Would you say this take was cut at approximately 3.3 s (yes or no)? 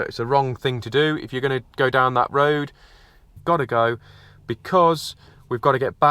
yes